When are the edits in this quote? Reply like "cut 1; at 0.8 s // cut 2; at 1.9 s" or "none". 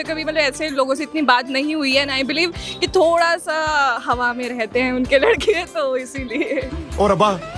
none